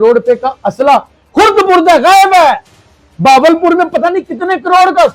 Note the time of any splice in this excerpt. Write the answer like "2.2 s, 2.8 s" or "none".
none